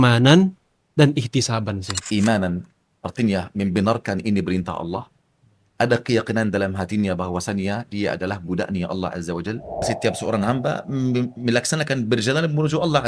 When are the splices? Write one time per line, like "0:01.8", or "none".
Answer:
0:01.9
0:09.9

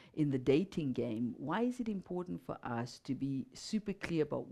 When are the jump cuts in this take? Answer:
none

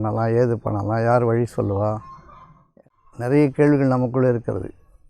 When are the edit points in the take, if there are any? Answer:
0:02.7

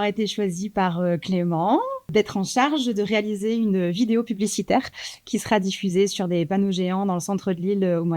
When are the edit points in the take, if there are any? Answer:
0:02.0

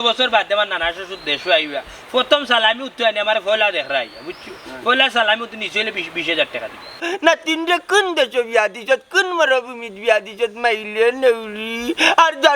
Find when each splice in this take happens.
0:07.1

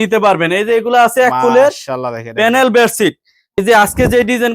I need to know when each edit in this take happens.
0:03.6

